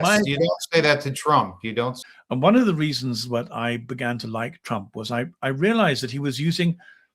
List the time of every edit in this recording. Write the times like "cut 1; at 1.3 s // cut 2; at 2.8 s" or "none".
cut 1; at 2.1 s

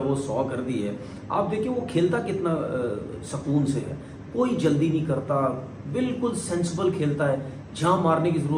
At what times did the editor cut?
none

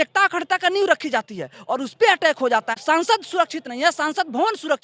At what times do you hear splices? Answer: cut 1; at 2.8 s

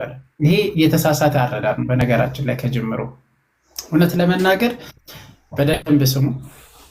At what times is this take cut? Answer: none

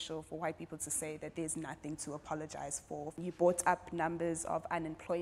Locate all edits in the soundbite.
none

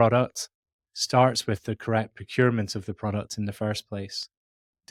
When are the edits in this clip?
none

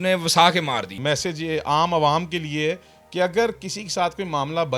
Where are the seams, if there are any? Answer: cut 1; at 0.9 s

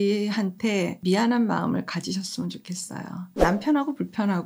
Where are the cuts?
cut 1; at 0.9 s // cut 2; at 3.3 s

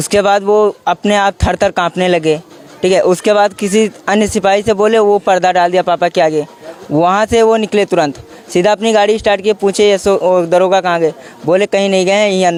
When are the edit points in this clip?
none

